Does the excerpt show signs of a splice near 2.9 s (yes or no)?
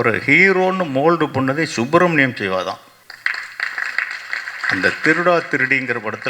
yes